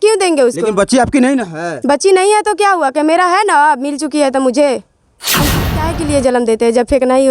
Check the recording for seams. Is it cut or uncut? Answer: cut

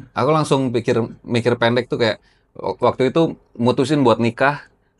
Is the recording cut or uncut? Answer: uncut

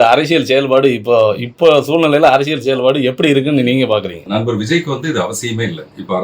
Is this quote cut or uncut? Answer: cut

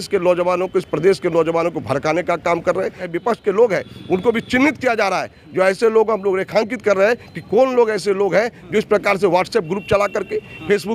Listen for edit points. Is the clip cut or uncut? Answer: cut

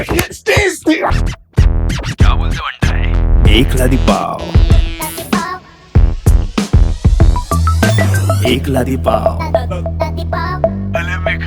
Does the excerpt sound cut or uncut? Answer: cut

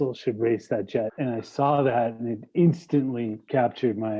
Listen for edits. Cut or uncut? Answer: cut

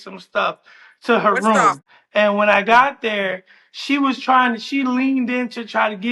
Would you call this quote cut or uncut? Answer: cut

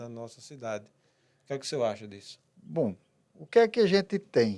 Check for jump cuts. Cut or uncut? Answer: uncut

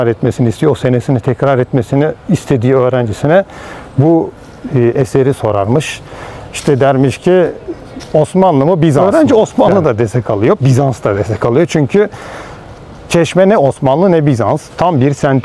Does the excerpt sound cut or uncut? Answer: cut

